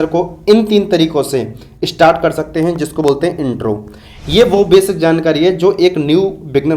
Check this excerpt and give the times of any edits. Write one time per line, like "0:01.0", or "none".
none